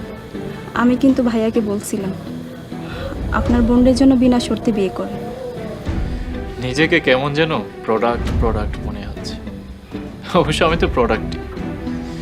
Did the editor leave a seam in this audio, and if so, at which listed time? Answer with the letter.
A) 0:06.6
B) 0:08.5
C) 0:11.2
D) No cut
C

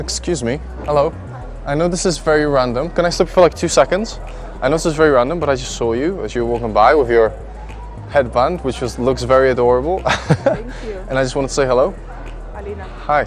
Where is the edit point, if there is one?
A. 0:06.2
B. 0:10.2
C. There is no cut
A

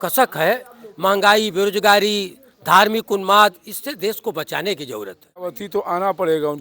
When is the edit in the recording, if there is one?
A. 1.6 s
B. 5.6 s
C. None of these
B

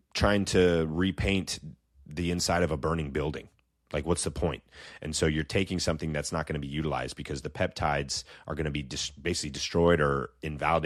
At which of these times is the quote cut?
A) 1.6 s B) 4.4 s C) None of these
C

